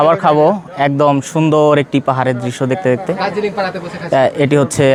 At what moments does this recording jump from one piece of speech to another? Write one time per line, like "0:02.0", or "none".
none